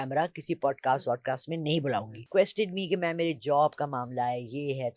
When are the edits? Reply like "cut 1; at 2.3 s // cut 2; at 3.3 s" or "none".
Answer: cut 1; at 2.3 s